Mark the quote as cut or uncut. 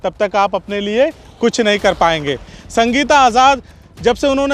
cut